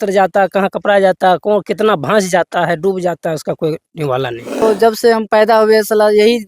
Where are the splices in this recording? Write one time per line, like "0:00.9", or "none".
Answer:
0:04.6